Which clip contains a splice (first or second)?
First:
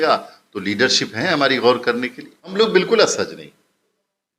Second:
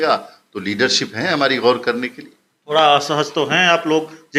first